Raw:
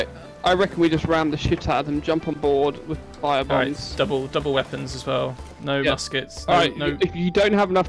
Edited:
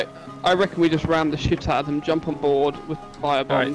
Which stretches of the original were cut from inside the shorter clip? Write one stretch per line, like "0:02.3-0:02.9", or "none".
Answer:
none